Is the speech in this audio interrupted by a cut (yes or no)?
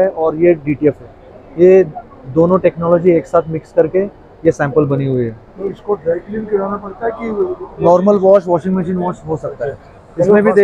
no